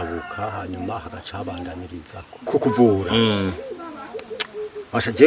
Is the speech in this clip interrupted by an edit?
yes; 1 cut; at 2.4 s

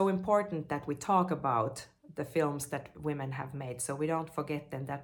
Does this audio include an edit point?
no; 0 cuts

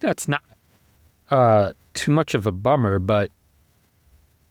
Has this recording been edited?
no; 0 cuts

